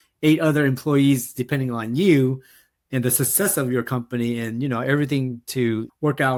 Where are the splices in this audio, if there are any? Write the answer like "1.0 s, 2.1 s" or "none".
none